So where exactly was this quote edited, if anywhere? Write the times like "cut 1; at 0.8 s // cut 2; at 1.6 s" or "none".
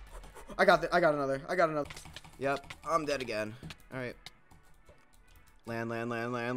cut 1; at 1.8 s